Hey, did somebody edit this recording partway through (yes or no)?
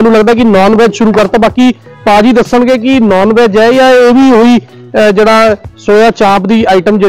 no